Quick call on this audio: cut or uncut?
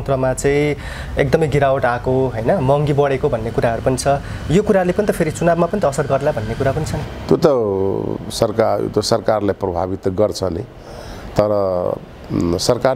uncut